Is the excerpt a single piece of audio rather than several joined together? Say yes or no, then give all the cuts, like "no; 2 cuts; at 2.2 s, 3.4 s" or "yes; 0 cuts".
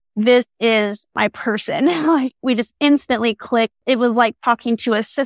no; 1 cut; at 3.8 s